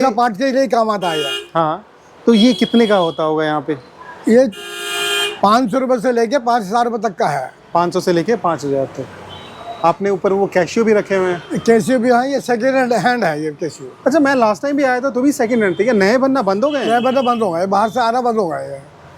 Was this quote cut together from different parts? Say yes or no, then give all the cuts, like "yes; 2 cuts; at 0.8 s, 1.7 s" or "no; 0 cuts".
no; 0 cuts